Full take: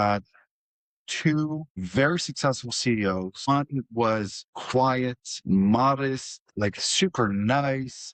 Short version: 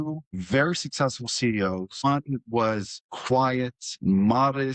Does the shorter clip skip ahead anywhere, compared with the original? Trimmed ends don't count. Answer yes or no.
no